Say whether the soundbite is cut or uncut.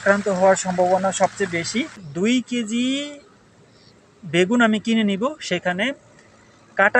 cut